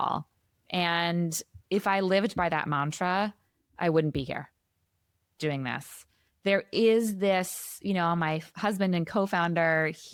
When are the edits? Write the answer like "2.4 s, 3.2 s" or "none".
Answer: none